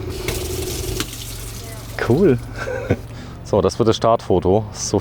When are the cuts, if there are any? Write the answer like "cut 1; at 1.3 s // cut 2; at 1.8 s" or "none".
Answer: cut 1; at 3.1 s